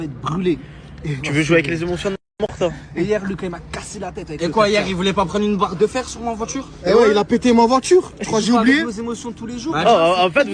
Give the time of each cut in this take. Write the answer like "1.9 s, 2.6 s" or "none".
none